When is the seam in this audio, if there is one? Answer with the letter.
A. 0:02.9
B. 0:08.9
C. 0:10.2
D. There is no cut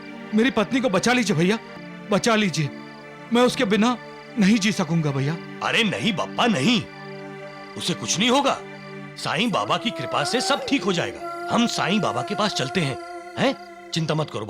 D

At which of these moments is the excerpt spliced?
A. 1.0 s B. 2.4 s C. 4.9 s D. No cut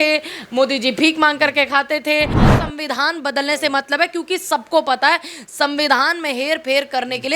B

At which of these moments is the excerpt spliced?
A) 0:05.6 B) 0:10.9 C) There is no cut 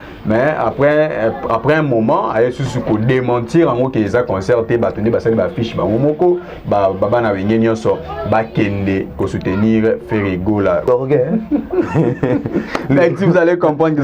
B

